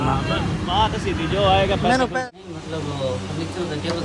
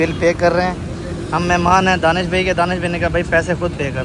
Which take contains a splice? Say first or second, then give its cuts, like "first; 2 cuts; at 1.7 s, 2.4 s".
first; 1 cut; at 2.2 s